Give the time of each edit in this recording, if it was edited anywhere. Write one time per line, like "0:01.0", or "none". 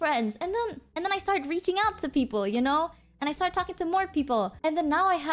none